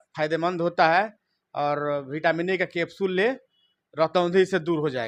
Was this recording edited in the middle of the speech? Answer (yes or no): no